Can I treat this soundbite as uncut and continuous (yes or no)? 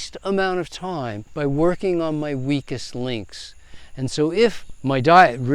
no